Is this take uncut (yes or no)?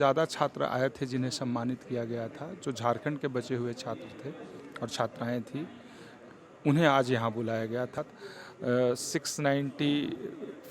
no